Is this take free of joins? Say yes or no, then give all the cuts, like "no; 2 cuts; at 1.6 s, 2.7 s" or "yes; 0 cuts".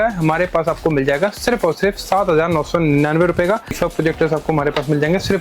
no; 1 cut; at 3.7 s